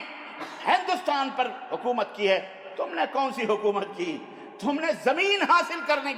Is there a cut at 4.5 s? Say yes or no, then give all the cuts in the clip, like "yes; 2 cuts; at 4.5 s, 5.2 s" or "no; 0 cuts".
no; 0 cuts